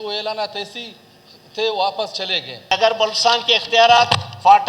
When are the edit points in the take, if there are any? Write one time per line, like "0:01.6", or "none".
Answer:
0:02.7